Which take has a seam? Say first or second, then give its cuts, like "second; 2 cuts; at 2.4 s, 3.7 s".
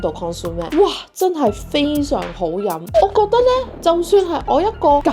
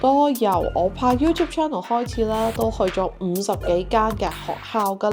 first; 1 cut; at 2.8 s